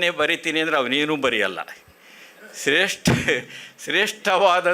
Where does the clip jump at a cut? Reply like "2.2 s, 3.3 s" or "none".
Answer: none